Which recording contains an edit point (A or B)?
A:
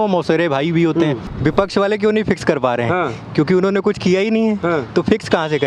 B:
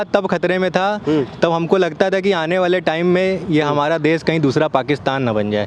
A